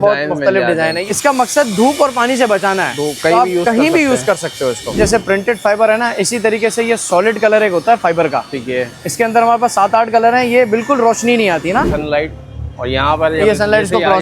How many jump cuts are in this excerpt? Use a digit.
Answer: 3